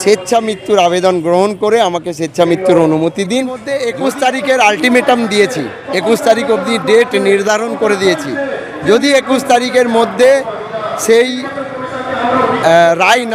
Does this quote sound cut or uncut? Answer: cut